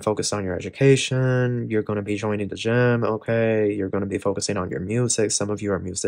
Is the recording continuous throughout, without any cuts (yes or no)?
yes